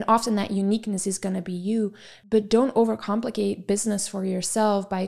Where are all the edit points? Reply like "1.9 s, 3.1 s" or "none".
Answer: 2.1 s